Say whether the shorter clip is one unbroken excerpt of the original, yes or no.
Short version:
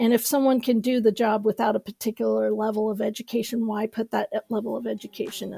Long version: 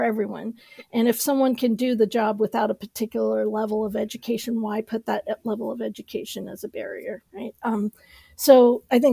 yes